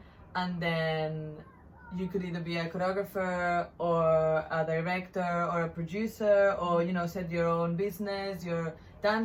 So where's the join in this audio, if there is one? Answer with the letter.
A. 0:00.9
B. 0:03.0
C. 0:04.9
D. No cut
D